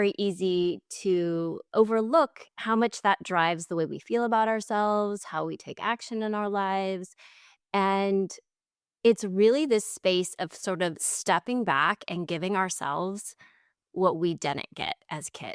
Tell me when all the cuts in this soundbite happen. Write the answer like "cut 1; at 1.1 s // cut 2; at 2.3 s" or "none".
cut 1; at 1.6 s